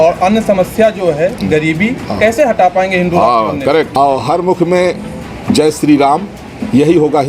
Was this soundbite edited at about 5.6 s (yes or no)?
no